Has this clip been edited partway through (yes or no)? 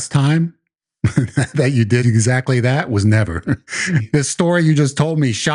yes